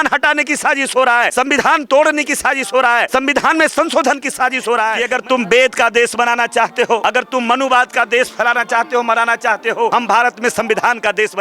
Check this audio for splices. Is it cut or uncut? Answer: cut